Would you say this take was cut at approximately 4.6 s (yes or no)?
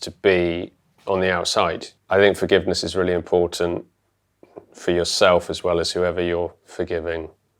no